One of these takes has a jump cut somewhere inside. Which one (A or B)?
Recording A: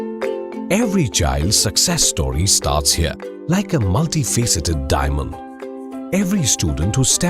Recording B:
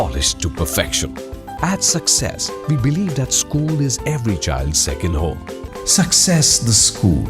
B